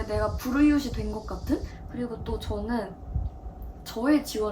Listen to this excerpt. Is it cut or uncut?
cut